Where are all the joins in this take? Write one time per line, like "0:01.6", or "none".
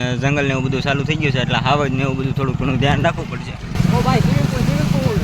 0:03.6